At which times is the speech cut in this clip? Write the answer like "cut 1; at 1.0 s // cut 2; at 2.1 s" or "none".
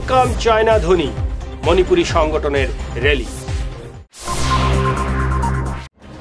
none